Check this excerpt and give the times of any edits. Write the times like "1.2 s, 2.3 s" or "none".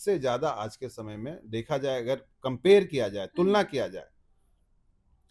none